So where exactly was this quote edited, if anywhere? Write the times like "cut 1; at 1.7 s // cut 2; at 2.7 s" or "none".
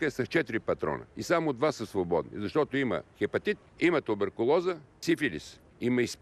cut 1; at 3.7 s // cut 2; at 5.2 s